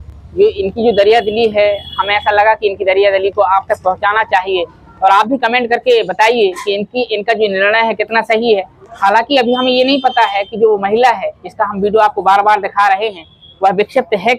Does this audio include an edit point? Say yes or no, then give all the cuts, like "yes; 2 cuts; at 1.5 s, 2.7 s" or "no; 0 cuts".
no; 0 cuts